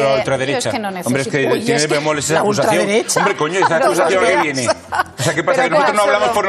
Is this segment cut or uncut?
uncut